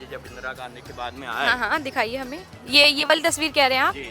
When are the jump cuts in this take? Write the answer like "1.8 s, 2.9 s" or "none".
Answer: 2.5 s

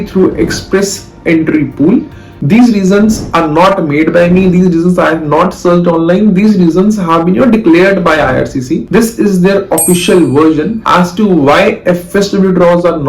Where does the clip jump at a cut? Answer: 2.4 s

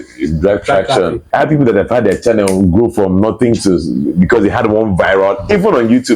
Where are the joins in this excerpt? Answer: 1.2 s

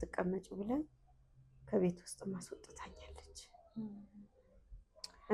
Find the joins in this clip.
none

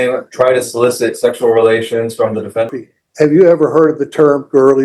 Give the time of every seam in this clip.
2.7 s

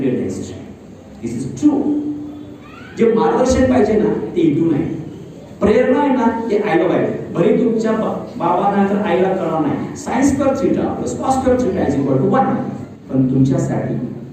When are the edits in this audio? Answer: 12.9 s

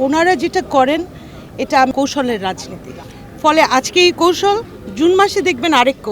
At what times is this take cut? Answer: 1.9 s

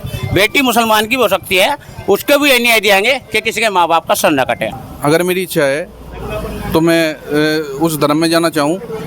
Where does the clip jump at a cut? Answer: 4.6 s

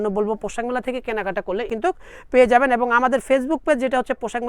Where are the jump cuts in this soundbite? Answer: 1.7 s

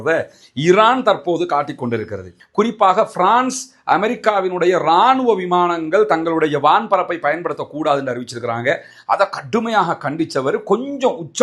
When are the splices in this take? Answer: 2.4 s

